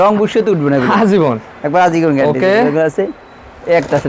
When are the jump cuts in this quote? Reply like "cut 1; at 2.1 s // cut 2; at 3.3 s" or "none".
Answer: none